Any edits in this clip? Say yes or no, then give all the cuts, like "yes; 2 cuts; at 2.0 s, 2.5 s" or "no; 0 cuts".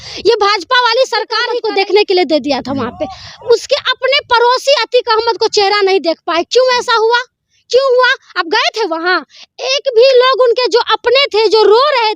yes; 1 cut; at 1.6 s